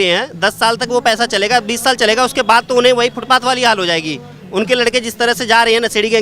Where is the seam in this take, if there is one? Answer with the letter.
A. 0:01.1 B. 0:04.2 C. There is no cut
C